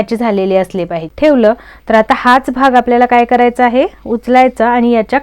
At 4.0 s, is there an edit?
no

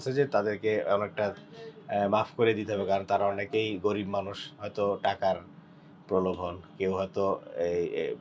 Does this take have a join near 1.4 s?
no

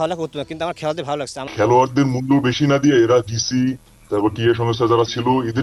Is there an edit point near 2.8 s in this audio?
no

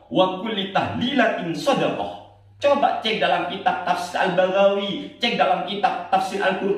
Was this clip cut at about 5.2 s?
no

